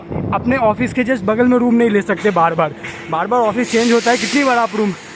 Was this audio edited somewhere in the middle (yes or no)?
no